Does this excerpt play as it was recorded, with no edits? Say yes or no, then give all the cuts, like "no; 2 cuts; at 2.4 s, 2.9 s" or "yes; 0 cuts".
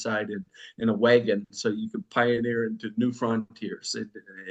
yes; 0 cuts